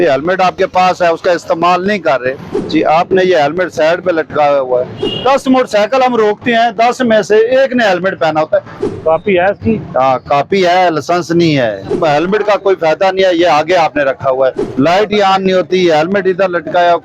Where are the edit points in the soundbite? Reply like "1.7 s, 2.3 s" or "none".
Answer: 2.5 s, 5.0 s, 8.8 s, 11.9 s, 14.6 s